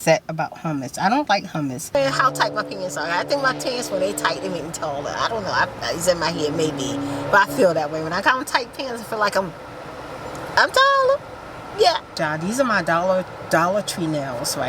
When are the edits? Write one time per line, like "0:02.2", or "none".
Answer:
0:02.0
0:12.2